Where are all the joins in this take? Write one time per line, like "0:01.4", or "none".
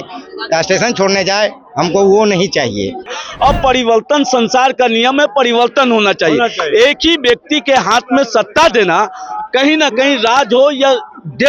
0:03.1